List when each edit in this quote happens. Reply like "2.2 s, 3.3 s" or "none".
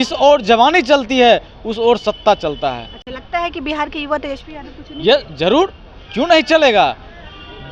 none